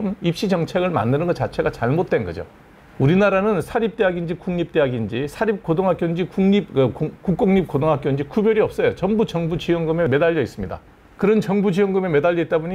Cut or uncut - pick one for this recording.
uncut